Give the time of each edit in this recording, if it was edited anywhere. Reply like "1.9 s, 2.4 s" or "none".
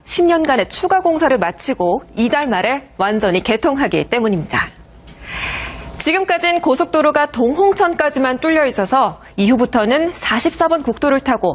none